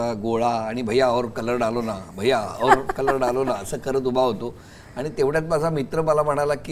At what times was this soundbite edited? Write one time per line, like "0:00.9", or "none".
none